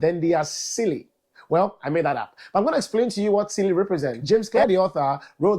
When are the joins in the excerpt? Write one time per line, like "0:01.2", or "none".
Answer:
0:04.6